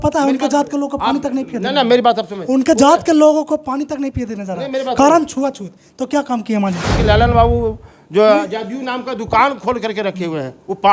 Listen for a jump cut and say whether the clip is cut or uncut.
cut